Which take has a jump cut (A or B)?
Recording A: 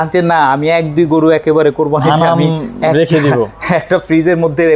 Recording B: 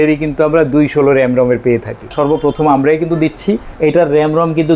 B